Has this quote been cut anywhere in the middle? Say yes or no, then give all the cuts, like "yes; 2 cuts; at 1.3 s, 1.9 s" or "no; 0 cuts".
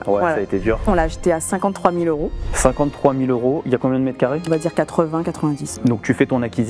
yes; 3 cuts; at 0.8 s, 4.4 s, 5.8 s